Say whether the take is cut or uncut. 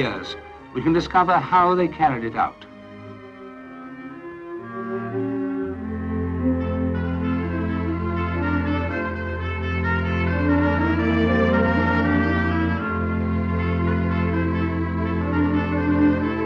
uncut